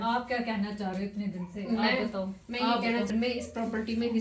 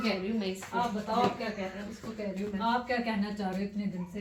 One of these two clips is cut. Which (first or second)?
first